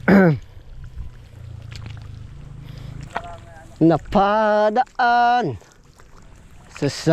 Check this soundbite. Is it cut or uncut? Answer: cut